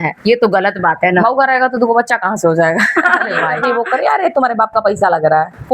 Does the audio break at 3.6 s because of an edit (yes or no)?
yes